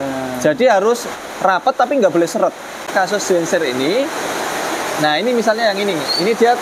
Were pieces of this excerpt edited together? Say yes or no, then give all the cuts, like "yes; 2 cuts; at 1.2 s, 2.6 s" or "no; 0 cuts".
yes; 1 cut; at 2.9 s